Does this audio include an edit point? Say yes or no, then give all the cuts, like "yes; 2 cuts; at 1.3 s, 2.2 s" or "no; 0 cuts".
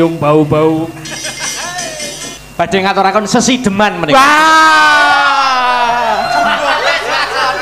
yes; 1 cut; at 2.4 s